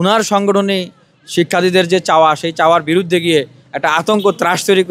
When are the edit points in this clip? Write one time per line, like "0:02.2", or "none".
none